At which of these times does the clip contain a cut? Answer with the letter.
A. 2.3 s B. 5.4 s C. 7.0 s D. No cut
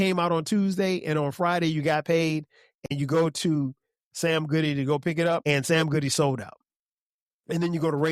B